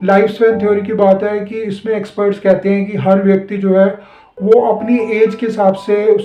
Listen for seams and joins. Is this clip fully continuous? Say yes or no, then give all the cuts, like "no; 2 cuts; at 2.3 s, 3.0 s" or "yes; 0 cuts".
yes; 0 cuts